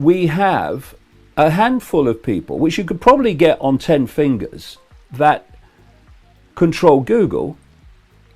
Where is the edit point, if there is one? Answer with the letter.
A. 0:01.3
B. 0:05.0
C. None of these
B